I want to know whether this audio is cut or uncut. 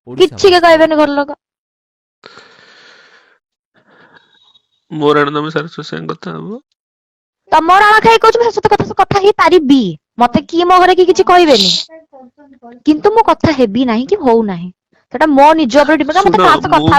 uncut